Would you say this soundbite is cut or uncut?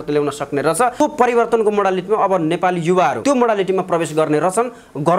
cut